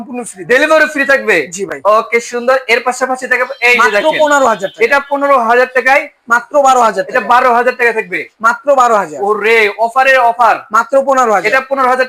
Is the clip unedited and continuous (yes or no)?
yes